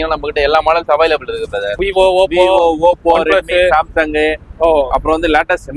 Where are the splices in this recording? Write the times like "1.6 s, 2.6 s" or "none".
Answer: 1.8 s